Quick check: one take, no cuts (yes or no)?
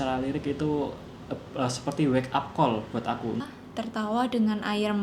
no